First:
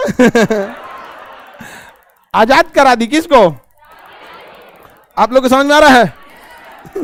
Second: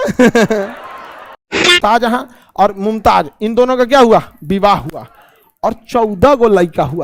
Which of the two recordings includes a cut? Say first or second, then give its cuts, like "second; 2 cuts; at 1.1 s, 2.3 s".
second; 1 cut; at 1.8 s